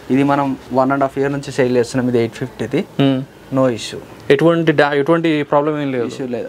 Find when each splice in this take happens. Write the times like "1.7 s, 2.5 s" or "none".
none

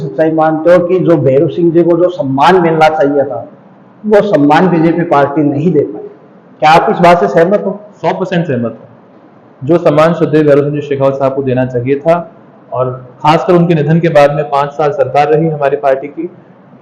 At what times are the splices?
none

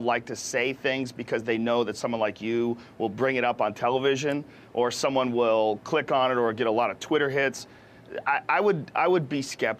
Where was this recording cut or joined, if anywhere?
7.3 s

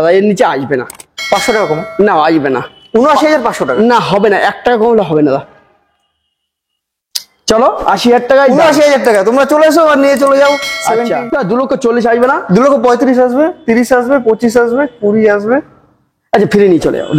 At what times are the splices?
11.2 s

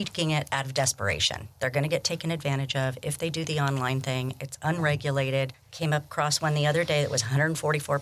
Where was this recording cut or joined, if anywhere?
5.6 s

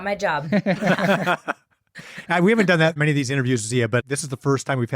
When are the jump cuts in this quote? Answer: 3.0 s, 4.0 s

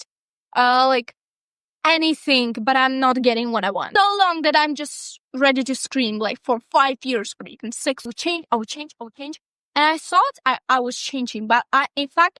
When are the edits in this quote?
3.8 s, 8.1 s

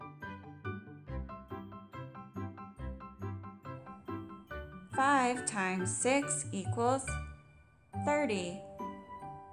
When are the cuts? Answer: 4.8 s, 8.6 s

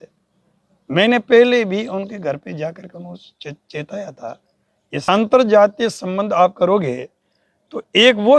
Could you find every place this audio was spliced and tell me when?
5.0 s

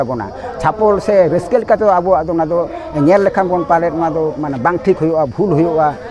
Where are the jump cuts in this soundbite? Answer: none

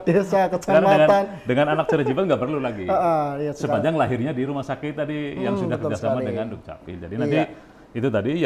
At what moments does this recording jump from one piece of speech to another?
none

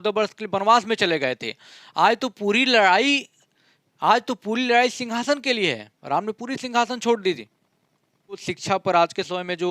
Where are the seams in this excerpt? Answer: 8.5 s

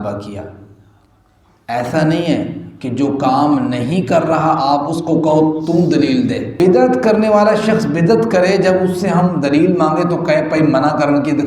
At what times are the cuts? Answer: 6.5 s

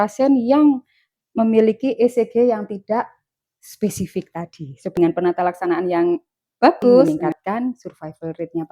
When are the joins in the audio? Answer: 4.9 s, 7.0 s

